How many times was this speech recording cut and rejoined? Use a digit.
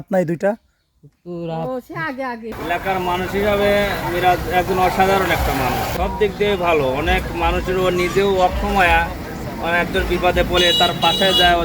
2